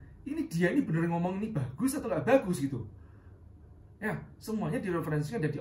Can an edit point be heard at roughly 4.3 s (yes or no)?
no